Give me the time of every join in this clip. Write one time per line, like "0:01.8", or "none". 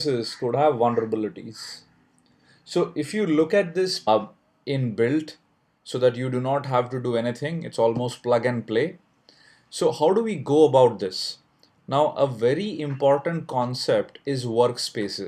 none